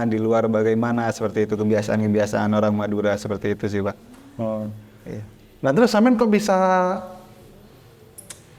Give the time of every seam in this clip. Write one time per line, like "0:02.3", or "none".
none